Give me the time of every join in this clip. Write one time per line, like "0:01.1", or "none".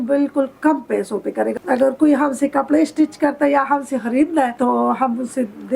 0:01.6
0:04.5